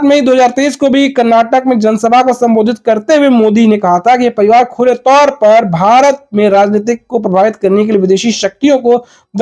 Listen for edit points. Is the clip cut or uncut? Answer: uncut